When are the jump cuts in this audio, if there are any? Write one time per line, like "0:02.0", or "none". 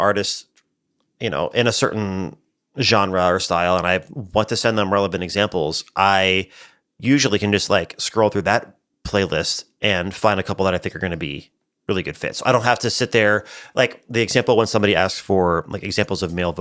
none